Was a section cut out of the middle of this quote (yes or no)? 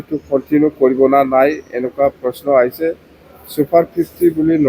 no